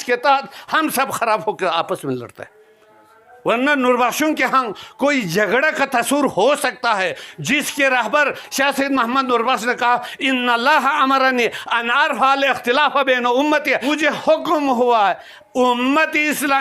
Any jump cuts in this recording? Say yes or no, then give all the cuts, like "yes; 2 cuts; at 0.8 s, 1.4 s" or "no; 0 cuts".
no; 0 cuts